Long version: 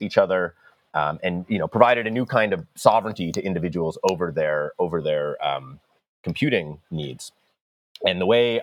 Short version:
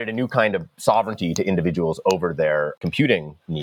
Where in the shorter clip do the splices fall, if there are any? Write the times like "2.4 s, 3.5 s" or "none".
2.7 s

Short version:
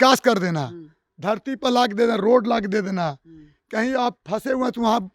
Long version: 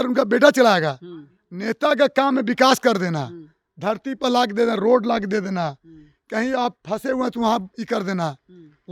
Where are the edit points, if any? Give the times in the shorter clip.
none

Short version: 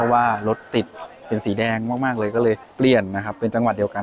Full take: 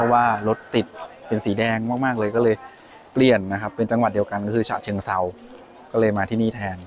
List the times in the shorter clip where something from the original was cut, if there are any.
2.7 s

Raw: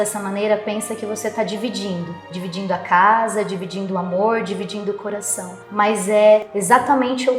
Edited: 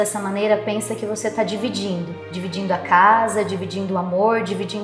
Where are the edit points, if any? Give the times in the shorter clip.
none

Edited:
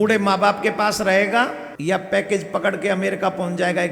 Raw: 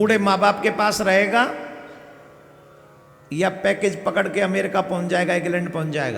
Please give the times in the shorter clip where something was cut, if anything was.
1.7 s

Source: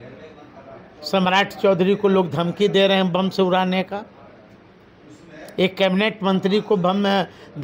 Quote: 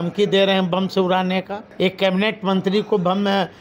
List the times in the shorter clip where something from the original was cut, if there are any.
1.6 s

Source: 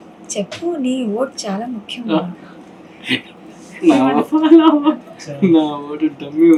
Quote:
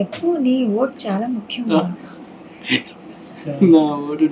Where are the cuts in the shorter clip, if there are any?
3.3 s

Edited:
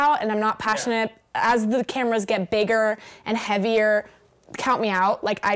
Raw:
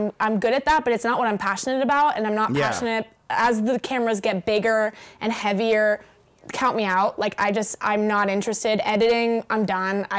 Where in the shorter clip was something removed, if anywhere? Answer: none

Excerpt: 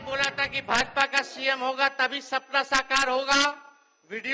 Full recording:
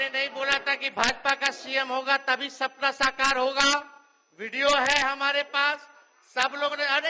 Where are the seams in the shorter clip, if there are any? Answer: none

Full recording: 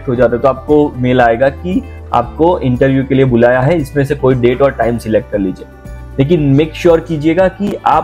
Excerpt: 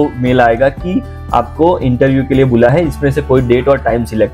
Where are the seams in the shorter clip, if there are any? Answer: 2.7 s

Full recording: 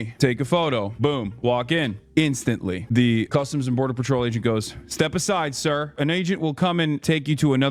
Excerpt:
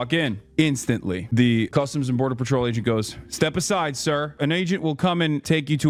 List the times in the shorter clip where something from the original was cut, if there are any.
none

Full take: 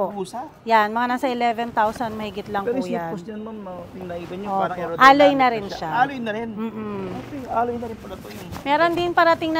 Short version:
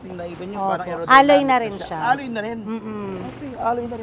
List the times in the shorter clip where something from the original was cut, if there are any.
none

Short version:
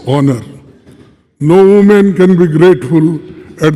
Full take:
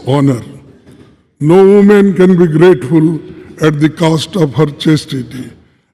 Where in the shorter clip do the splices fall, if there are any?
none

